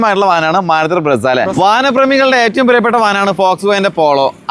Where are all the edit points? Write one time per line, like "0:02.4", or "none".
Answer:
0:01.5